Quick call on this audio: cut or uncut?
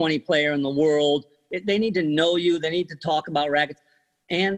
cut